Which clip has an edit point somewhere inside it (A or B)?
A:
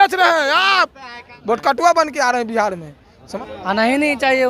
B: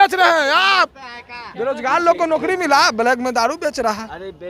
A